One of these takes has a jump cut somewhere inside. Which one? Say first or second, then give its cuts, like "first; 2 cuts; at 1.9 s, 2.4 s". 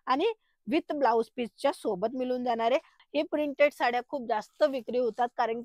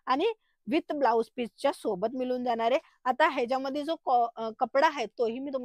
first; 1 cut; at 2.9 s